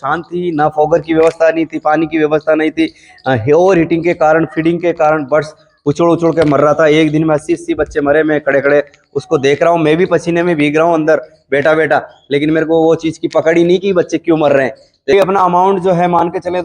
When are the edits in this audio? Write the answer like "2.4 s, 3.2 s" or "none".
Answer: 15.1 s